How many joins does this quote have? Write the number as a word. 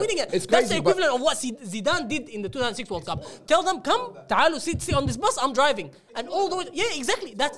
zero